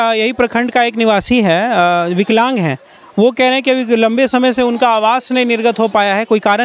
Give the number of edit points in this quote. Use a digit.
0